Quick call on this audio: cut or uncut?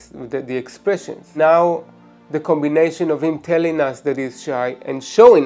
cut